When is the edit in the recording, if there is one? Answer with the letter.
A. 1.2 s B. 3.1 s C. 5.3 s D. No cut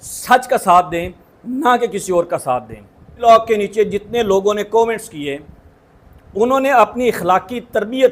B